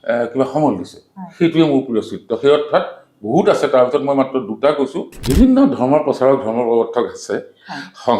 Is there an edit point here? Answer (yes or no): yes